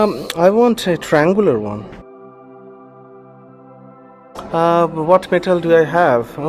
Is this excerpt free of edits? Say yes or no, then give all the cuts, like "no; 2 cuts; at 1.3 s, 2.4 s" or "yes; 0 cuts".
no; 1 cut; at 3.5 s